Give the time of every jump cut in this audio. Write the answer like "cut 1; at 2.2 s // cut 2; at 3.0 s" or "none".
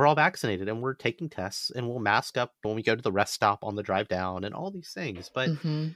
none